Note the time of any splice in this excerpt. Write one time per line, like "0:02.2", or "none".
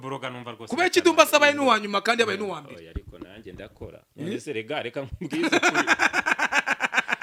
none